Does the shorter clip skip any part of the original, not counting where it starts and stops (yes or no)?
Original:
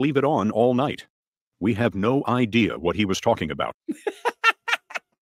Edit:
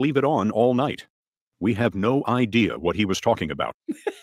no